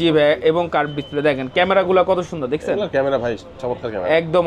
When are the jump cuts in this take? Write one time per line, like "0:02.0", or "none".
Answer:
none

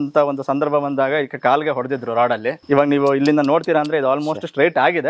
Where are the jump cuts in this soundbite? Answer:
0:02.6

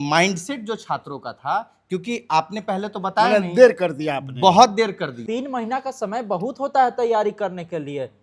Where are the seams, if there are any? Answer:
0:05.2

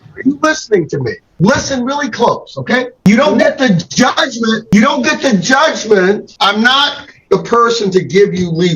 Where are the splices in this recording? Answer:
0:03.0
0:06.3

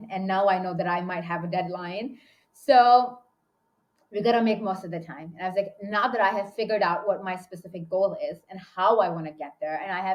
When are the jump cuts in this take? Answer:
none

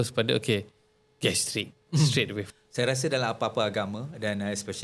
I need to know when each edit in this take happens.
0:02.5

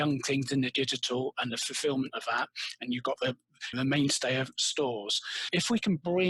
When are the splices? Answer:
none

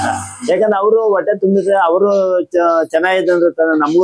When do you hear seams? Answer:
none

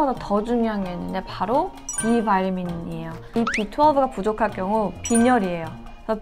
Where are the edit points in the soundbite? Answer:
0:03.3

